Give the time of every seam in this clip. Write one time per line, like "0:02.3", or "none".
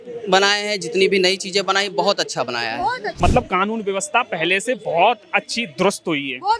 0:03.1